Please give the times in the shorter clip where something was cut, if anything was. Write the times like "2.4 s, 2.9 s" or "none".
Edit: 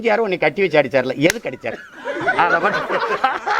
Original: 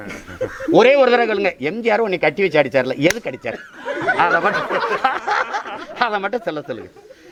none